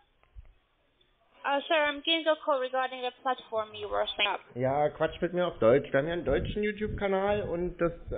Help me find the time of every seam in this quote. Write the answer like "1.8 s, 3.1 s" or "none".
none